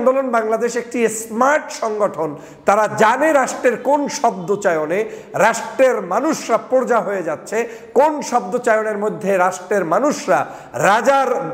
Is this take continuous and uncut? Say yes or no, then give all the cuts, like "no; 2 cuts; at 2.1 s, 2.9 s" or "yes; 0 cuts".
yes; 0 cuts